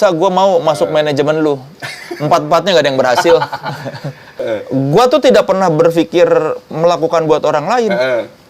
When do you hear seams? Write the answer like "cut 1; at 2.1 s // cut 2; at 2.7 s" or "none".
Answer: cut 1; at 4.4 s

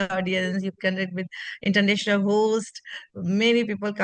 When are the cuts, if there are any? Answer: none

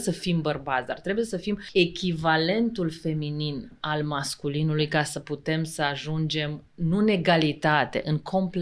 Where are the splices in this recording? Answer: cut 1; at 1.6 s

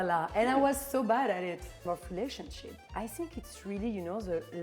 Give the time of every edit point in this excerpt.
cut 1; at 1.8 s

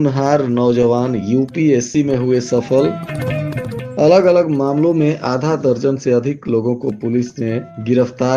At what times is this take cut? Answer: none

